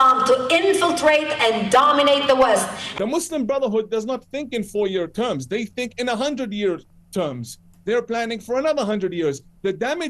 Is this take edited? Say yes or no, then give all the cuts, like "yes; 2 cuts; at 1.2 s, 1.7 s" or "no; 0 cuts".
yes; 1 cut; at 2.8 s